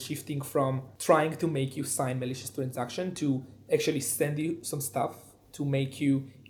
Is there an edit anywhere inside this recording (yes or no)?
no